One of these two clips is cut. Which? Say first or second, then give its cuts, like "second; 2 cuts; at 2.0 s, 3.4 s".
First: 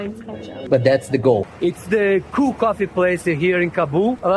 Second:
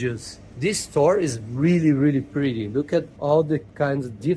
first; 1 cut; at 1.5 s